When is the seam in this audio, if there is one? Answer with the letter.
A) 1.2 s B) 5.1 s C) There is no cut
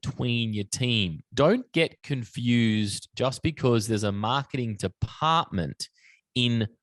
A